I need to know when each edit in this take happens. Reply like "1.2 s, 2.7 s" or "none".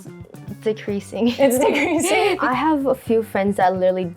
2.4 s